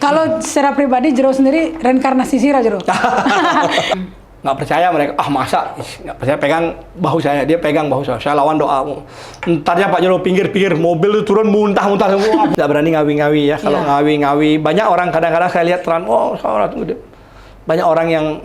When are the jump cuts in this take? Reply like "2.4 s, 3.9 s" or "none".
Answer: 3.9 s, 12.5 s